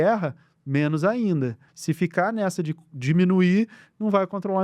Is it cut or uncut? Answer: cut